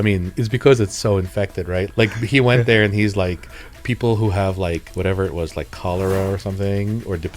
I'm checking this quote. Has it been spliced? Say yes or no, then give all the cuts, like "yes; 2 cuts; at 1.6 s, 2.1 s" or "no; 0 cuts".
yes; 2 cuts; at 1.9 s, 4.9 s